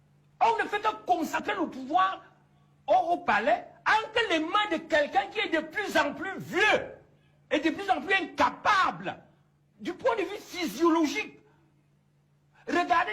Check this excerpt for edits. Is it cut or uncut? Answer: cut